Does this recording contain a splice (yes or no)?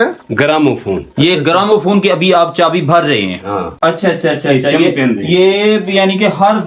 yes